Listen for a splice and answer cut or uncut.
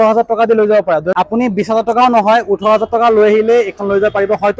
cut